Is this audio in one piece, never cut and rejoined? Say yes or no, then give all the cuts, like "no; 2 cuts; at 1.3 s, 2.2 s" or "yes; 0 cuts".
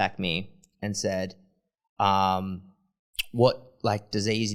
yes; 0 cuts